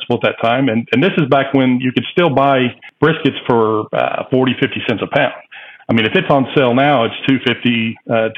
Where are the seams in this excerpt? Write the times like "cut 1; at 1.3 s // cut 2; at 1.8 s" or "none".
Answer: cut 1; at 2.8 s